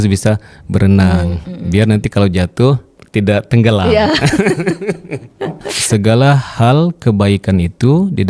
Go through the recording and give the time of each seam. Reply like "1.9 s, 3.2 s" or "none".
2.9 s, 5.7 s